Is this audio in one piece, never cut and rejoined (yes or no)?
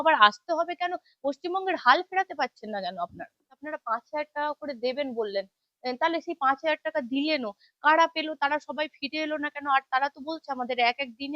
no